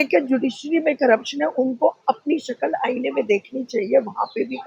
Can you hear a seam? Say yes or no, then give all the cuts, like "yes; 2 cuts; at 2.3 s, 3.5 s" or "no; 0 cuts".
no; 0 cuts